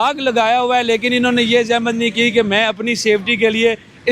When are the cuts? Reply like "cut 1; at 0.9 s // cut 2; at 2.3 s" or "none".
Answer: none